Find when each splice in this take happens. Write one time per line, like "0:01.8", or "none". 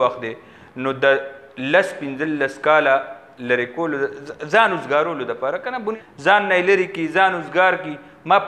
0:05.9